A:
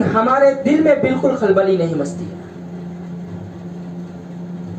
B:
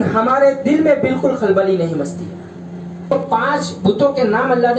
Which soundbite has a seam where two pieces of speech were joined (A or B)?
B